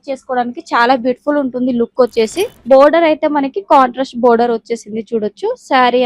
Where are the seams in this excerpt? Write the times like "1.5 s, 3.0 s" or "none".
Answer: 2.6 s